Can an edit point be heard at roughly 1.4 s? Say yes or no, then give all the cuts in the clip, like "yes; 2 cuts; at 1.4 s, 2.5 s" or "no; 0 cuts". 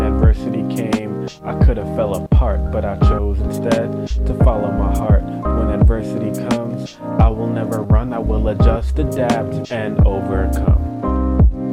no; 0 cuts